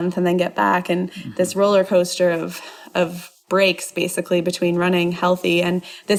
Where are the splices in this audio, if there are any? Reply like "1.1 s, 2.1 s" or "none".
none